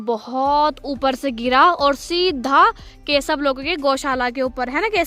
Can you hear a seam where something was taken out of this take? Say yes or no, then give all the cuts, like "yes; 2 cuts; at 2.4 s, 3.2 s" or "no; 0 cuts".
no; 0 cuts